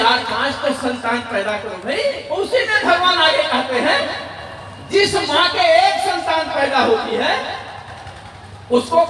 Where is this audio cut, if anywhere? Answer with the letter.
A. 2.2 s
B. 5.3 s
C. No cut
A